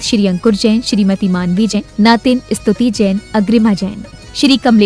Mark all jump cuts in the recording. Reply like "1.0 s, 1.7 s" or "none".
1.8 s